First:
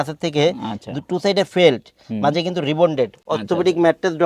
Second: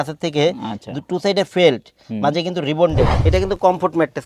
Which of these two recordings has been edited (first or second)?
second